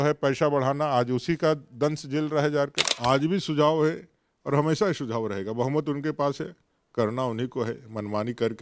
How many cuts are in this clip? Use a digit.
1